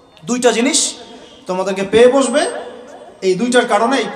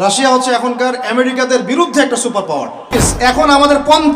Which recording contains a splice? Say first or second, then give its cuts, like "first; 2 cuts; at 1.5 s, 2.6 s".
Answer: second; 1 cut; at 2.9 s